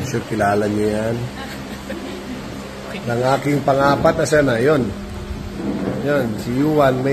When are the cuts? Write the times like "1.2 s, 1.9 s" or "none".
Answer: none